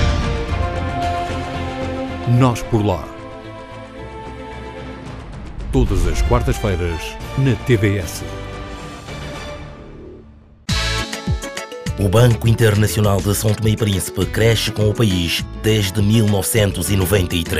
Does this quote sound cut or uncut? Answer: cut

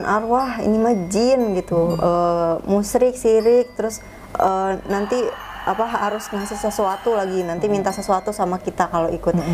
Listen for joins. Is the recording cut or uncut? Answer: uncut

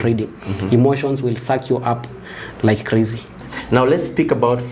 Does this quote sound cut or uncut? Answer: cut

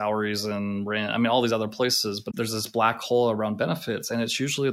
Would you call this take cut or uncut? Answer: cut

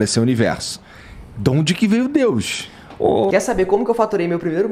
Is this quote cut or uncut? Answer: cut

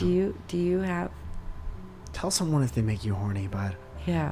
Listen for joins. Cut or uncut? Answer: uncut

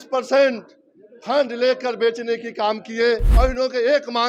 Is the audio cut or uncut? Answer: cut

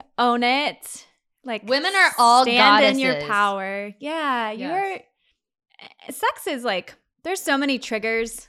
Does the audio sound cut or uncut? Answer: uncut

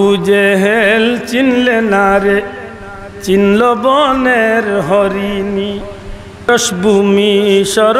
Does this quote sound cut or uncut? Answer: cut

